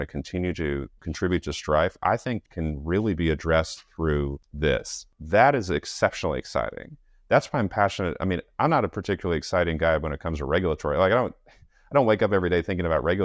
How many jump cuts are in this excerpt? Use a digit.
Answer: 4